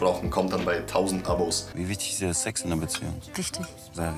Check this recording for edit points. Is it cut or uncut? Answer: cut